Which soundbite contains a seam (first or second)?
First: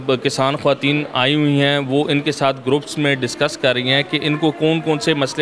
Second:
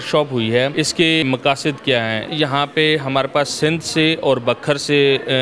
second